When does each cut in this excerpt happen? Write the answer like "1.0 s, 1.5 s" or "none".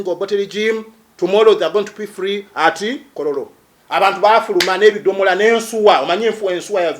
3.1 s